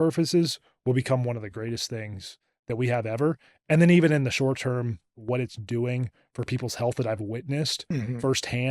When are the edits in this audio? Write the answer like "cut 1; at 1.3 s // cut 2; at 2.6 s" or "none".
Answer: cut 1; at 5.1 s

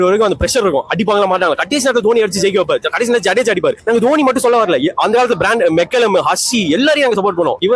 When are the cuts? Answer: none

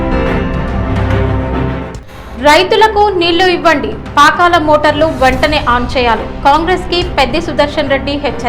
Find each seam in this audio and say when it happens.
none

